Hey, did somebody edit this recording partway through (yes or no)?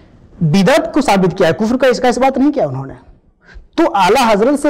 no